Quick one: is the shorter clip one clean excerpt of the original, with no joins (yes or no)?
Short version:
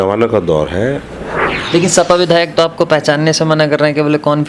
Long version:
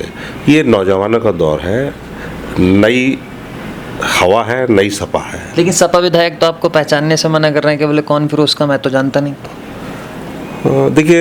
no